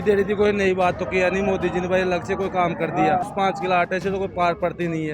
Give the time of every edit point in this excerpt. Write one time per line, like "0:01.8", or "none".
0:03.3